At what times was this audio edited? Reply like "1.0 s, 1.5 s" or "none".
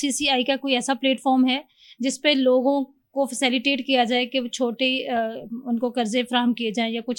none